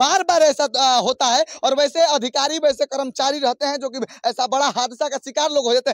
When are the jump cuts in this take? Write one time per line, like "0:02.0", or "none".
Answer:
none